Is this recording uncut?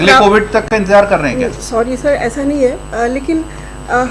yes; 0 cuts

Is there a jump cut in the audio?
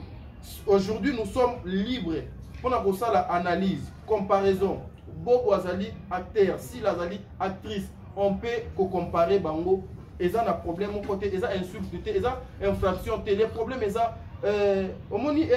no; 0 cuts

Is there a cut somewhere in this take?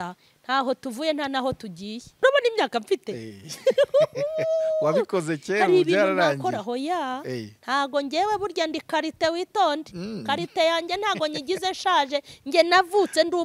yes; 1 cut; at 2.2 s

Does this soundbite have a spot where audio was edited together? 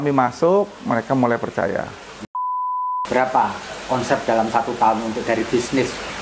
yes; 1 cut; at 2.6 s

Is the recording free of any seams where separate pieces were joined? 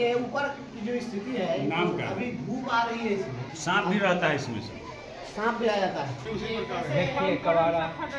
no; 2 cuts; at 3.5 s, 6.2 s

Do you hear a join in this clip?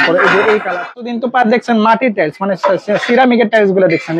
yes; 1 cut; at 1.1 s

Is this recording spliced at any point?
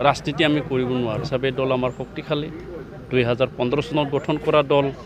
yes; 1 cut; at 1.2 s

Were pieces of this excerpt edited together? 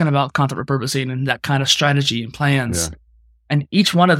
no; 0 cuts

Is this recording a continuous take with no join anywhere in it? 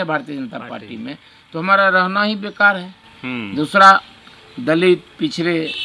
yes; 0 cuts

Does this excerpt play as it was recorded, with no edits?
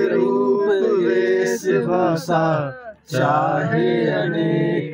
yes; 0 cuts

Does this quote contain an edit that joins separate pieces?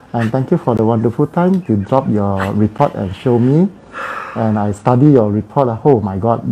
no; 0 cuts

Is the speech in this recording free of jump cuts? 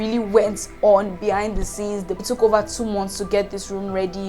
no; 1 cut; at 2.2 s

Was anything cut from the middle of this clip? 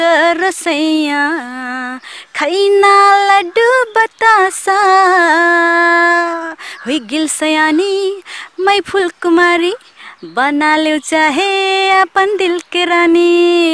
no; 0 cuts

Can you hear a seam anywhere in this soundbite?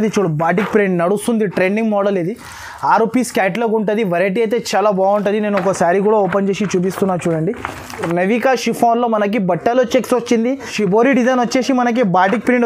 yes; 2 cuts; at 8.1 s, 10.7 s

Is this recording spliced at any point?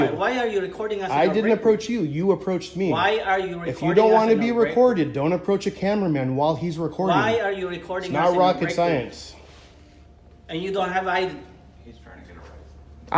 no; 0 cuts

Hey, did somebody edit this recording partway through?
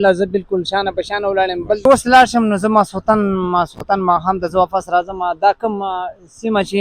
yes; 1 cut; at 1.9 s

